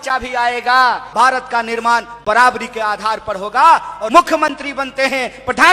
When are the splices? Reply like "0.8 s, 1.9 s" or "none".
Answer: 1.1 s, 4.0 s